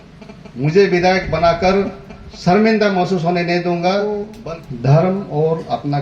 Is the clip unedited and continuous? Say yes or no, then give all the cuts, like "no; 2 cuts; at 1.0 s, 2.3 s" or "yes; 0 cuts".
no; 1 cut; at 4.3 s